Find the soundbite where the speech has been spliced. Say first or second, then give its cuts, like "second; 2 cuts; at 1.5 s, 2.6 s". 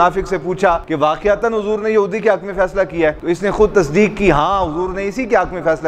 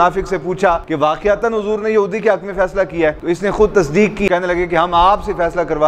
second; 1 cut; at 4.3 s